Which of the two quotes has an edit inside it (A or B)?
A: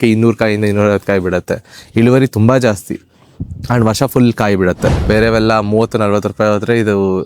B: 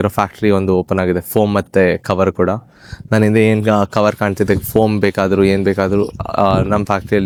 A